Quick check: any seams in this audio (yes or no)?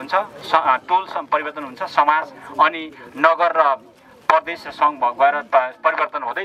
no